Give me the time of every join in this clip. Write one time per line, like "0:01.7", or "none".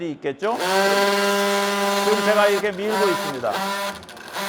none